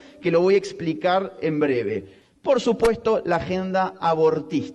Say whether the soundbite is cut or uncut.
cut